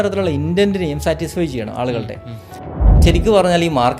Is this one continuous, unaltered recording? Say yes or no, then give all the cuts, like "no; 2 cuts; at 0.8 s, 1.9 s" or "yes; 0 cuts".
no; 1 cut; at 2.8 s